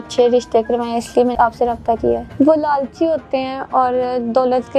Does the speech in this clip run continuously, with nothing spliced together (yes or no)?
no